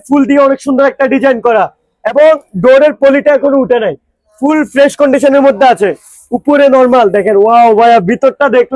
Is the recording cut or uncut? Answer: uncut